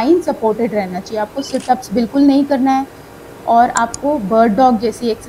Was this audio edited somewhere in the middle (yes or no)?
no